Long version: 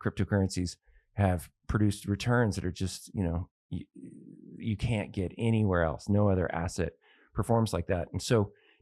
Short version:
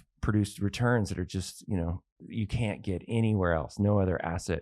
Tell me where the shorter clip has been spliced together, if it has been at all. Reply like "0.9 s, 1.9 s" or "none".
2.1 s

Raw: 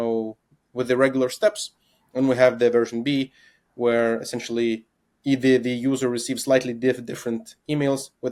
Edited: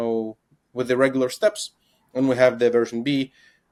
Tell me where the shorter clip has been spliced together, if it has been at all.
none

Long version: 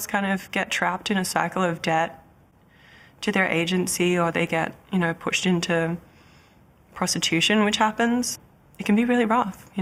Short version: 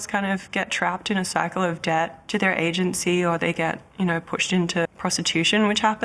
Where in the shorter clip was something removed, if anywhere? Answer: 2.2 s, 4.9 s

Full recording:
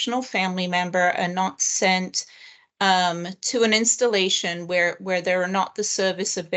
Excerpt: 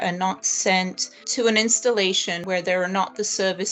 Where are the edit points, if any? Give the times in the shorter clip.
1.2 s, 2.4 s

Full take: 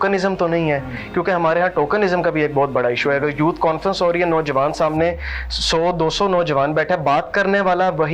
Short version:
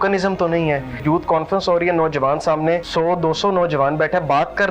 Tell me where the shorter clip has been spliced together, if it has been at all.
1.0 s, 2.9 s

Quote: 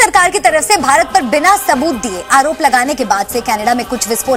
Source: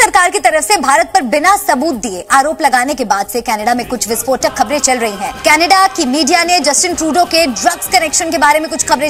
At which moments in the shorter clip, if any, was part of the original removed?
none

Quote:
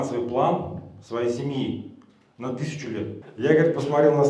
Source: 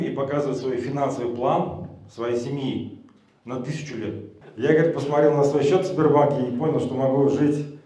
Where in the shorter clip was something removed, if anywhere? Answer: 3.2 s

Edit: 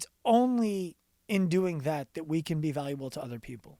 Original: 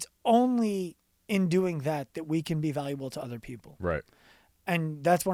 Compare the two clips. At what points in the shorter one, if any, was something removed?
none

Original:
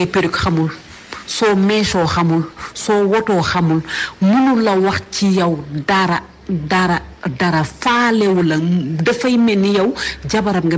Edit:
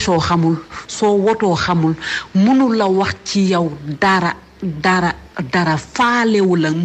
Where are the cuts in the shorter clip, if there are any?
none

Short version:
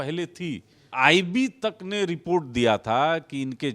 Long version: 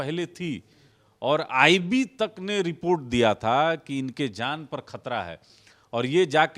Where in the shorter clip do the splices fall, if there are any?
0.9 s

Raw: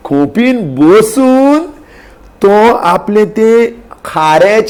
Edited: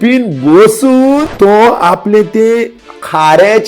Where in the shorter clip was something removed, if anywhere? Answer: 1.3 s

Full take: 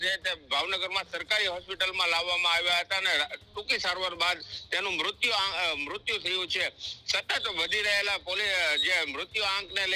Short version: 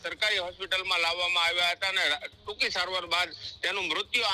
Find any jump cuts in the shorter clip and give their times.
none

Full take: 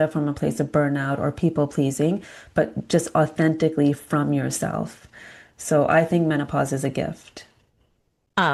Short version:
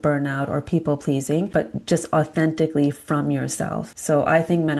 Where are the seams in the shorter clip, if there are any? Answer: 1.5 s, 3.9 s

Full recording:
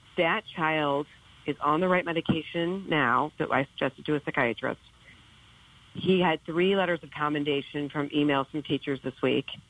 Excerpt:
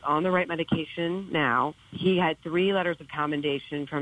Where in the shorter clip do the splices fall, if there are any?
1.8 s

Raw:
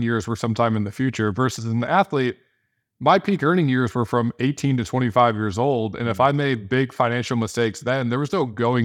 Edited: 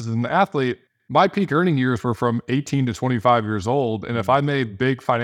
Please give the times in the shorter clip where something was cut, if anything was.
0.9 s

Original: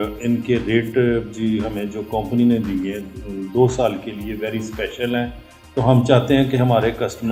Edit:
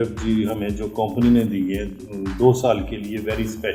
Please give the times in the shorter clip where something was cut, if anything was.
none

